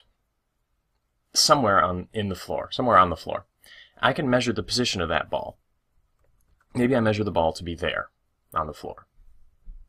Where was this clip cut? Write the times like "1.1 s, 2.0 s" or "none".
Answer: 7.3 s

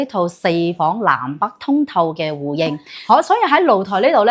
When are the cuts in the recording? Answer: 2.9 s

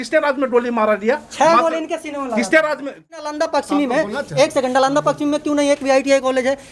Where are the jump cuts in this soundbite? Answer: 3.2 s

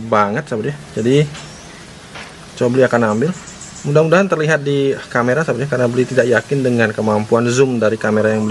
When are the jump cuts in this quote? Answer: none

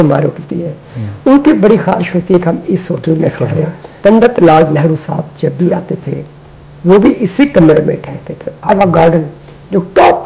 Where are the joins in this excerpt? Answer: 3.8 s, 8.7 s

